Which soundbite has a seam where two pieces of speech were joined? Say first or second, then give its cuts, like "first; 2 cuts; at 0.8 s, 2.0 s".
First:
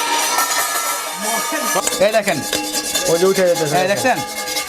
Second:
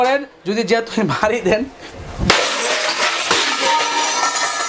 first; 1 cut; at 1.8 s